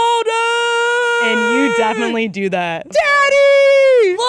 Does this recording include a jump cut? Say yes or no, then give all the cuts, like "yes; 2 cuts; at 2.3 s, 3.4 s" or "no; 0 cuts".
yes; 1 cut; at 2.9 s